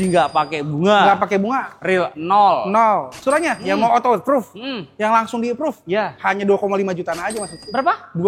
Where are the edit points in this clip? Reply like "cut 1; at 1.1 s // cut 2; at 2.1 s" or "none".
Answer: cut 1; at 3.1 s